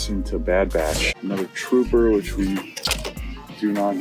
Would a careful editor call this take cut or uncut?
cut